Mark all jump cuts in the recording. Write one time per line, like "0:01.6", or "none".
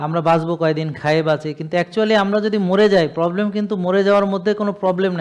none

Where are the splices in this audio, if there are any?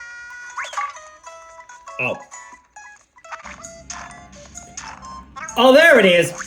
0:03.4

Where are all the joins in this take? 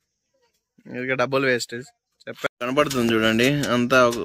0:02.4

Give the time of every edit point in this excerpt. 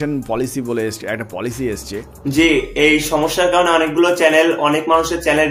0:02.2

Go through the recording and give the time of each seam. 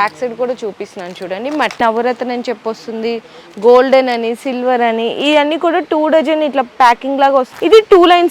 0:01.8
0:07.5

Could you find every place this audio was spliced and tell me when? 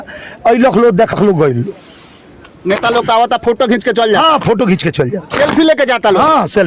0:01.1
0:05.2

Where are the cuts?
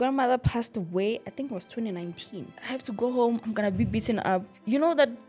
0:02.5

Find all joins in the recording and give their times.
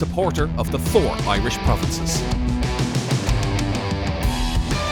none

